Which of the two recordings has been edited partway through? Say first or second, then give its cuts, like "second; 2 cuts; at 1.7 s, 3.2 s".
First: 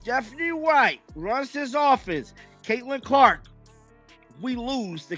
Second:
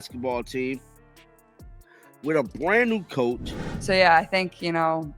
second; 1 cut; at 3.6 s